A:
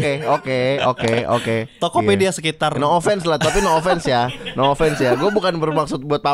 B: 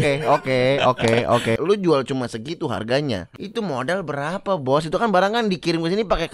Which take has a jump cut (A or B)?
B